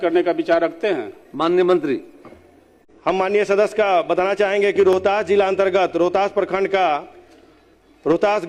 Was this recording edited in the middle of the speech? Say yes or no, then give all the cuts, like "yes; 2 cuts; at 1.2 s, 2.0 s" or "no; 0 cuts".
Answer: no; 0 cuts